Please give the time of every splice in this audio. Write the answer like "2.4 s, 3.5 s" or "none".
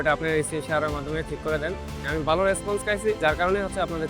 2.0 s, 3.2 s